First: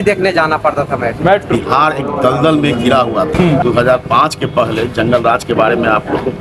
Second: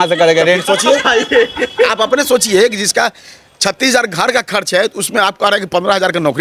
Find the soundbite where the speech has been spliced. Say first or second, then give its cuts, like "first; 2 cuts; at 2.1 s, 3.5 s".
first; 2 cuts; at 1.5 s, 3.3 s